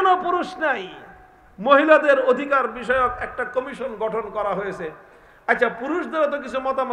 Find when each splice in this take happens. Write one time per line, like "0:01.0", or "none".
none